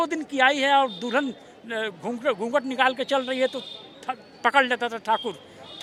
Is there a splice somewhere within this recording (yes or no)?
no